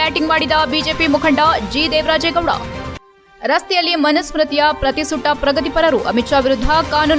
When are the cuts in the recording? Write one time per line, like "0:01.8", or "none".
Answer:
none